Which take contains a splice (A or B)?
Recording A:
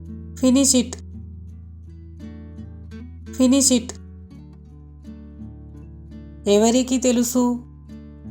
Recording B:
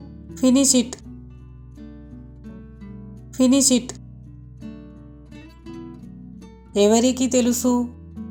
A